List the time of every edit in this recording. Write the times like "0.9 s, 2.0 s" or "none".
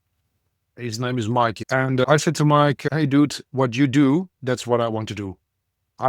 1.6 s